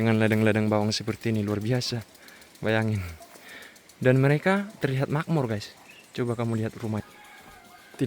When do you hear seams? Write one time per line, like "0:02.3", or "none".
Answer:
0:07.0

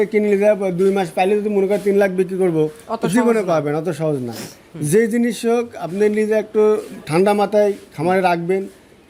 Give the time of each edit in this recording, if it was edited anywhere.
none

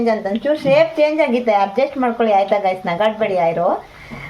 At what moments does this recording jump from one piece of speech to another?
none

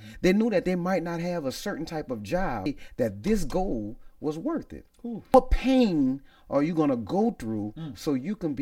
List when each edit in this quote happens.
0:02.7
0:05.3

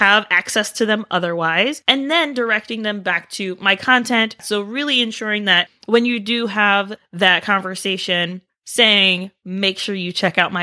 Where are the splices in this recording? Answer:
0:04.4
0:08.4

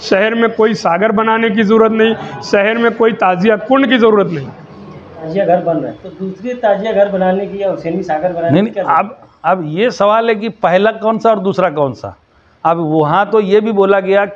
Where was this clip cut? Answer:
0:05.3

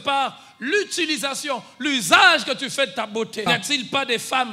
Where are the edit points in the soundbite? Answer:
0:03.4

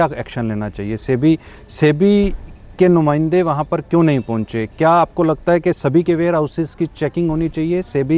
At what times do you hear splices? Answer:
none

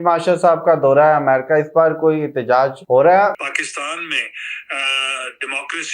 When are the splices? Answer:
0:02.8
0:03.4

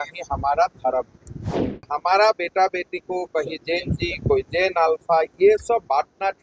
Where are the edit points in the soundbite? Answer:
0:01.8

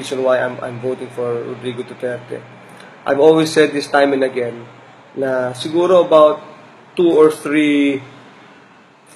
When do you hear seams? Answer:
0:02.7

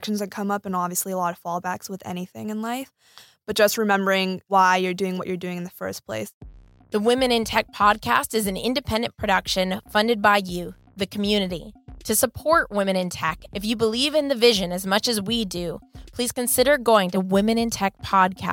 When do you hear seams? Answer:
0:04.4
0:06.3

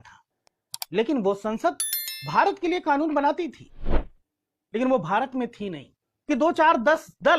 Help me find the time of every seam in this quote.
0:06.1

